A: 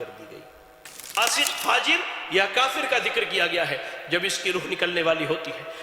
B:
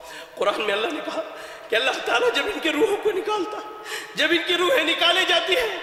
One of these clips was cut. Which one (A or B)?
A